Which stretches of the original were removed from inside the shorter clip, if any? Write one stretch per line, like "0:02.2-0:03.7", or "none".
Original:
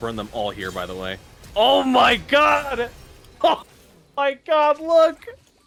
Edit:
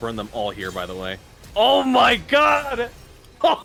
none